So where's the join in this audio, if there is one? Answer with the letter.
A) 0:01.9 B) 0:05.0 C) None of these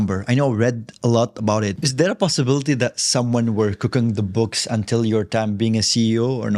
A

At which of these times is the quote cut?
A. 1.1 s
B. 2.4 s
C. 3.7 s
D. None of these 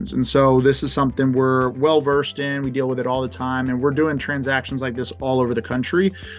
D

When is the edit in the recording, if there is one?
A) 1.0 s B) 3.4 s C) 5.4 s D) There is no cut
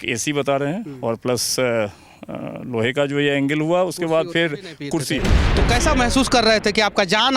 C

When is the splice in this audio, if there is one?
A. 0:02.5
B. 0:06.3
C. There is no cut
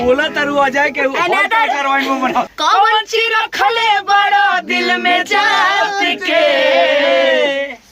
A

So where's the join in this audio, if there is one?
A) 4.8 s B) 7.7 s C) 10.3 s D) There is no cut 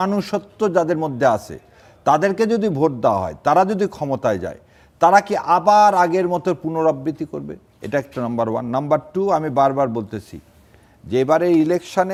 D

